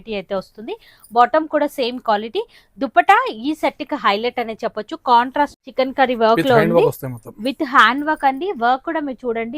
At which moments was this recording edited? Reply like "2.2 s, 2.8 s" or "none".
5.5 s